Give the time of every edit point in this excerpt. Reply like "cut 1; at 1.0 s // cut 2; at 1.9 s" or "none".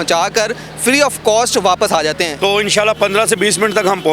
cut 1; at 2.3 s